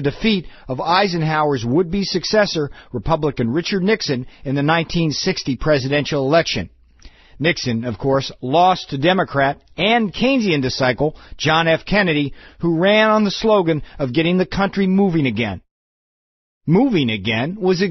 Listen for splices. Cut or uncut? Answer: uncut